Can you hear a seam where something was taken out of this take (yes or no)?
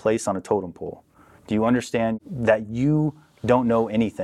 yes